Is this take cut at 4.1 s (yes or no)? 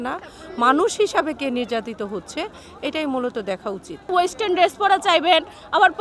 yes